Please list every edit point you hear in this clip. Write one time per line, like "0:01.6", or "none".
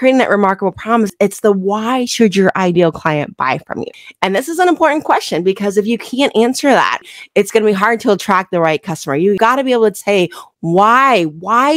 0:03.8
0:07.0